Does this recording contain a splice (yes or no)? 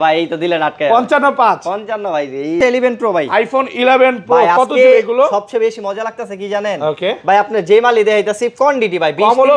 yes